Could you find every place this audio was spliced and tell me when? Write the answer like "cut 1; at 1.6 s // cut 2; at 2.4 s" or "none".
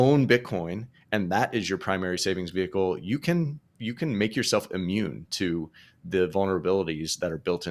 none